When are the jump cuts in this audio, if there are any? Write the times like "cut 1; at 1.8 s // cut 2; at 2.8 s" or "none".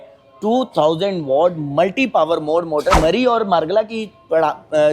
cut 1; at 3.0 s